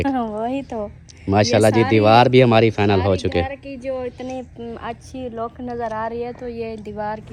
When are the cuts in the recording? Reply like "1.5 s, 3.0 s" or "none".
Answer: none